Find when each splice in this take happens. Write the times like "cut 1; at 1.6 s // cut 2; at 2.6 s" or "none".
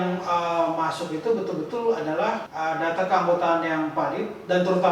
cut 1; at 2.5 s